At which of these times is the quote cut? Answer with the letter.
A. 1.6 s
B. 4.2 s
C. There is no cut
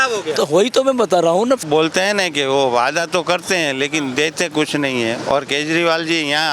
A